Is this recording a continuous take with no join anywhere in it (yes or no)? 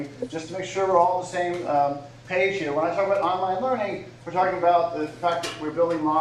yes